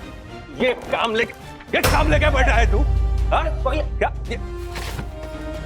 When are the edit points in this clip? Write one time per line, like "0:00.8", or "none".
none